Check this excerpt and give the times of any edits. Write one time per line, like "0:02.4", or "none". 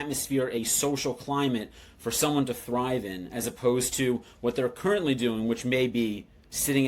none